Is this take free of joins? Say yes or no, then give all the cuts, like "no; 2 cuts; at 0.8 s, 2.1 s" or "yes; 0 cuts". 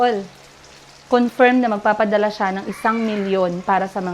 yes; 0 cuts